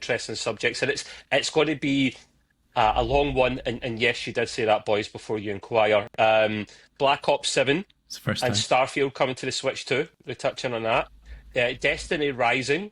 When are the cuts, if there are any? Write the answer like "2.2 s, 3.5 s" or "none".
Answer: none

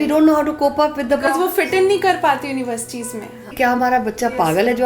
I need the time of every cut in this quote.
3.5 s

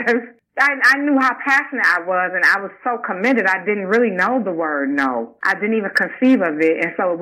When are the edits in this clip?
none

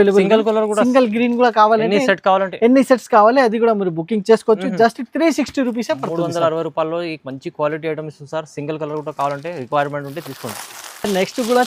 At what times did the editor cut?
none

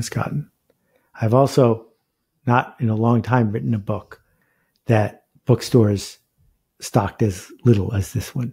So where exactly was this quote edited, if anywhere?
5.2 s

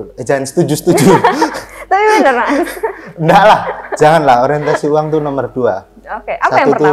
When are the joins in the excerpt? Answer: none

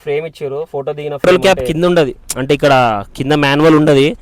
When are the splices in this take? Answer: 1.2 s

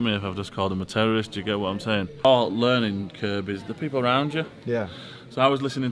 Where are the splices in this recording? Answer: 2.2 s

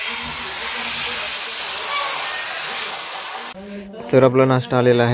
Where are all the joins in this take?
3.5 s

